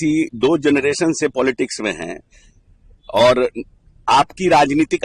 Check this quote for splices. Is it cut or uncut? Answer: uncut